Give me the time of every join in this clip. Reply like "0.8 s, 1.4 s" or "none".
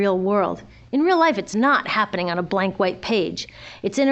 3.0 s